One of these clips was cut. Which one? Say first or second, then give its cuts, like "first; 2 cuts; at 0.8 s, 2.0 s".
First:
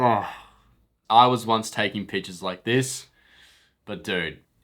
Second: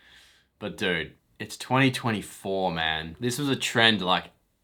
first; 1 cut; at 1.0 s